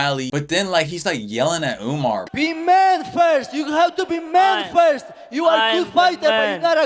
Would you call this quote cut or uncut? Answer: uncut